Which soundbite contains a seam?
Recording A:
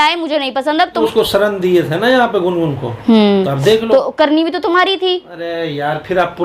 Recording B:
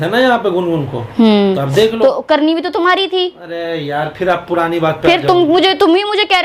A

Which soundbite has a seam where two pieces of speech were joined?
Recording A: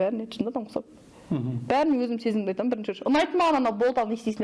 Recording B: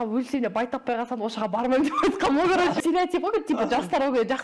B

